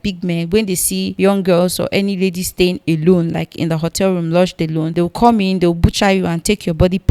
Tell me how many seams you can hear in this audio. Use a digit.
2